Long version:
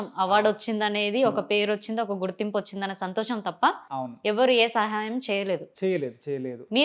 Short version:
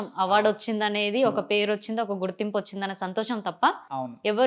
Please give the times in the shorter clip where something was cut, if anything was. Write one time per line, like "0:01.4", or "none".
none